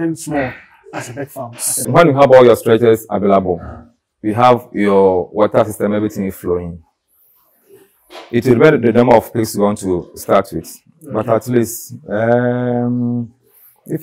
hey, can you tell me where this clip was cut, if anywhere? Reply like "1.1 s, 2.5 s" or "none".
1.9 s